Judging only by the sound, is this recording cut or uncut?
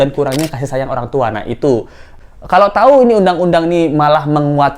cut